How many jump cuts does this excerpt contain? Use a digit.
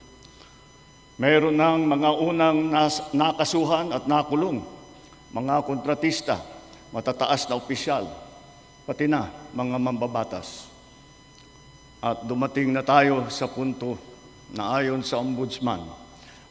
0